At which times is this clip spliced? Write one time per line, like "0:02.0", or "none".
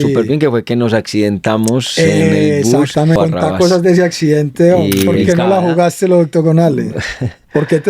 0:03.2
0:05.2